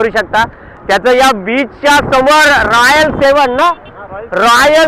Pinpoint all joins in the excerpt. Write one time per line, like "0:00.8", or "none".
none